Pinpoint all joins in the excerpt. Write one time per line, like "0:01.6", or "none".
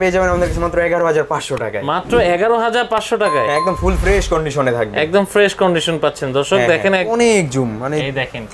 0:07.1